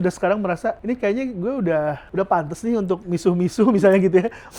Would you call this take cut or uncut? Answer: cut